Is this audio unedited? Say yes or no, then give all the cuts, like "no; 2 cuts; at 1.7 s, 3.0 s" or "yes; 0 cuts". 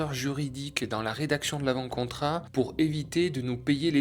no; 1 cut; at 2.4 s